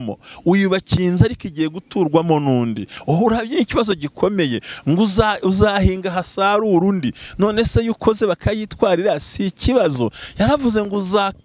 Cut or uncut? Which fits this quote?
uncut